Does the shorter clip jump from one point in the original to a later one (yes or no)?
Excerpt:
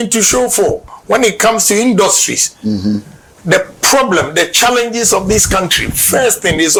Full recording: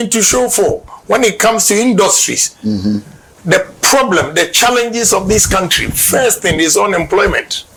no